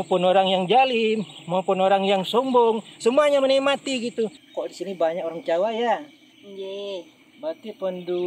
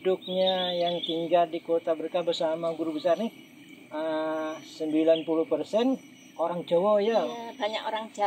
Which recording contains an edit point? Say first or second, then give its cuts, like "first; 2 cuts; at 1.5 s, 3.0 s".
first; 1 cut; at 4.5 s